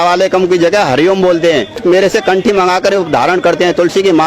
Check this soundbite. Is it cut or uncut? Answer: cut